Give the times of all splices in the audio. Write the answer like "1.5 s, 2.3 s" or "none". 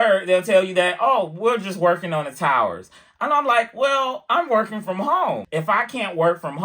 5.4 s